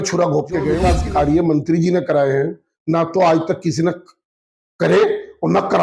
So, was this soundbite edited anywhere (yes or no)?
yes